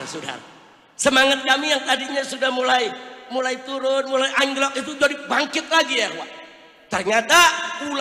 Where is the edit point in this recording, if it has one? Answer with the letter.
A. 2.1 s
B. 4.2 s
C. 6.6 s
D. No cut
D